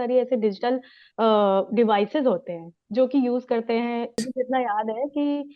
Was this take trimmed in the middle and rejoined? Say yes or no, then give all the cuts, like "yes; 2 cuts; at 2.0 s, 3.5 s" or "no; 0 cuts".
yes; 1 cut; at 4.2 s